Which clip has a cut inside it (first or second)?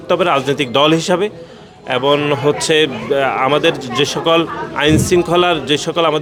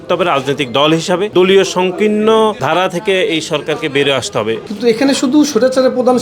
second